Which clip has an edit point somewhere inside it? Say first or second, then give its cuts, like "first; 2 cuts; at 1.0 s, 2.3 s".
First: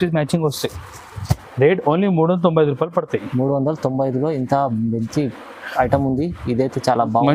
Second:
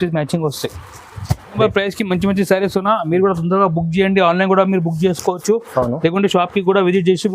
second; 1 cut; at 1.6 s